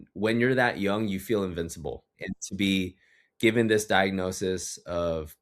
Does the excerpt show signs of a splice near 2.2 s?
yes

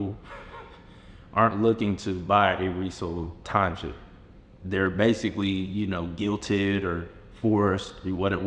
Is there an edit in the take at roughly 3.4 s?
yes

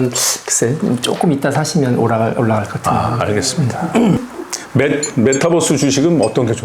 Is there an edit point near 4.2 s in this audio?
yes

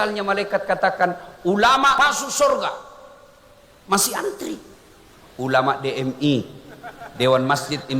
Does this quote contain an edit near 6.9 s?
no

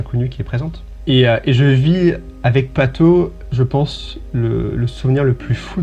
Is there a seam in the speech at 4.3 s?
no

